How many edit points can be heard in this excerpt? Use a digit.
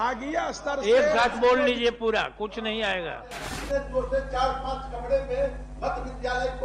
1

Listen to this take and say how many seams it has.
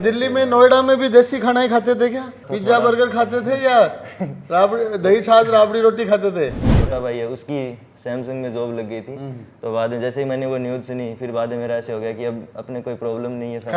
2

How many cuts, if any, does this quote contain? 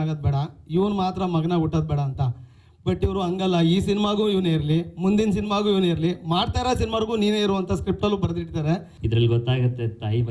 1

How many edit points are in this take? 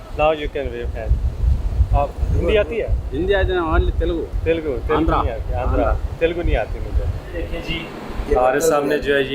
1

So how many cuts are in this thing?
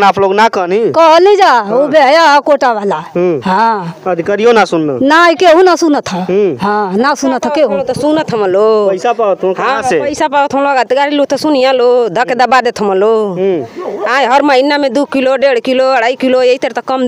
0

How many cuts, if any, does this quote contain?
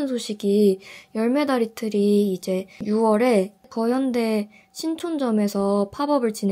2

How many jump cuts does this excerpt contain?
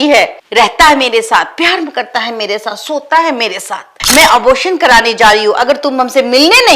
1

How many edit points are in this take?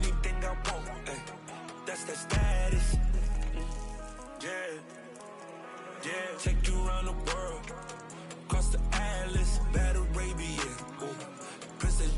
1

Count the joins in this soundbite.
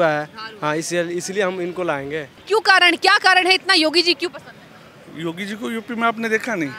1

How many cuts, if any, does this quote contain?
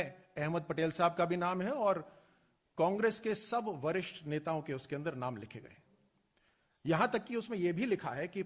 2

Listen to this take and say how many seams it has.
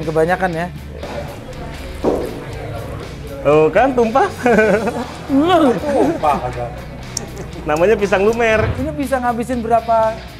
2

